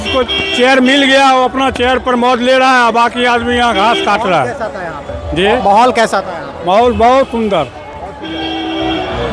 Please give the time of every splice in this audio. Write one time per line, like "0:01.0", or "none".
none